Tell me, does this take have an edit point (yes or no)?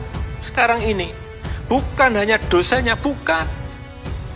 no